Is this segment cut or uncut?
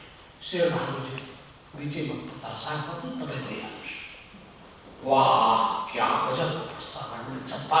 uncut